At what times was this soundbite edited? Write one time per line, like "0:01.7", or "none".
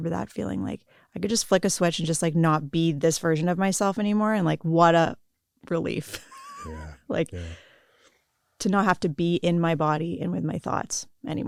none